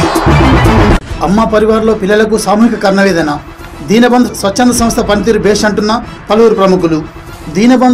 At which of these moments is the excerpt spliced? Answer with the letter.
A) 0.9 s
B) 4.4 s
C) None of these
A